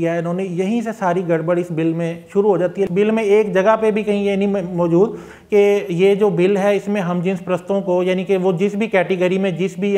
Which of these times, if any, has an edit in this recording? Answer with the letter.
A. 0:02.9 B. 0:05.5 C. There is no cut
A